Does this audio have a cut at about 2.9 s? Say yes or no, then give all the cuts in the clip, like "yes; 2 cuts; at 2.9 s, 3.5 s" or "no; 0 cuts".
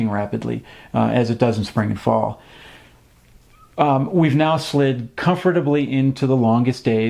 yes; 1 cut; at 2.9 s